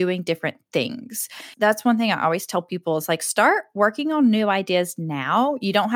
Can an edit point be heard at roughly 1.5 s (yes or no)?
yes